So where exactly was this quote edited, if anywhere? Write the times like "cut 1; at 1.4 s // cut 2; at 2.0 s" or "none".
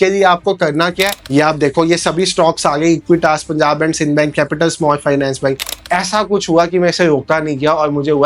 cut 1; at 1.2 s // cut 2; at 5.8 s